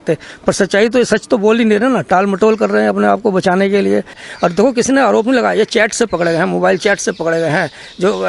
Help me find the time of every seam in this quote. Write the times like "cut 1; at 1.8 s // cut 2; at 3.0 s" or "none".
cut 1; at 4.2 s